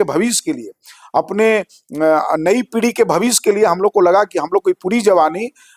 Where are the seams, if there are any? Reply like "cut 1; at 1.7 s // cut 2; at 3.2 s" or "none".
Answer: none